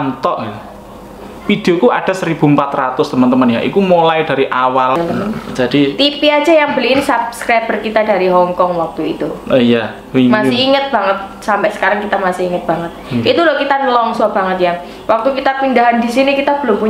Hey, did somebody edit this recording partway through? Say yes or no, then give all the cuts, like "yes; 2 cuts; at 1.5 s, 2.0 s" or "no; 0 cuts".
yes; 1 cut; at 5.0 s